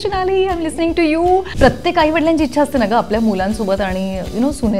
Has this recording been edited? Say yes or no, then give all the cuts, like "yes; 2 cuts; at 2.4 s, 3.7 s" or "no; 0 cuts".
yes; 1 cut; at 1.5 s